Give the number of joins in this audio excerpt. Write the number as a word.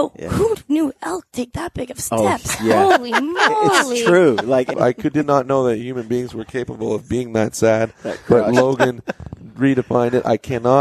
one